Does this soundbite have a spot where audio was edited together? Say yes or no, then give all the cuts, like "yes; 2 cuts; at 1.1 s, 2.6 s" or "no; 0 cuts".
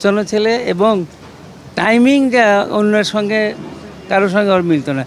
no; 0 cuts